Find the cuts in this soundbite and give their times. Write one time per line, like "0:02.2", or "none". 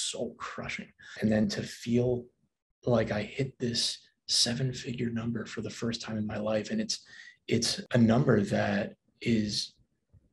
0:01.4